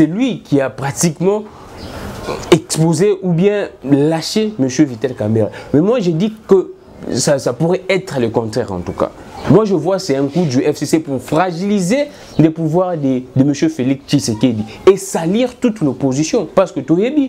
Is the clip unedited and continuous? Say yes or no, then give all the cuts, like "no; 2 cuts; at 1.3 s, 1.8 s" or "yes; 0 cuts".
yes; 0 cuts